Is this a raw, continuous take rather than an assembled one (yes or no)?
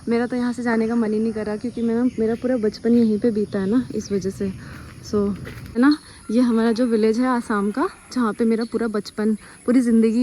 no